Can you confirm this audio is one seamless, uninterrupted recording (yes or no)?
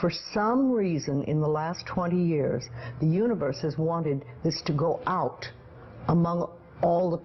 no